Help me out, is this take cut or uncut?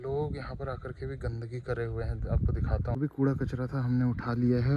cut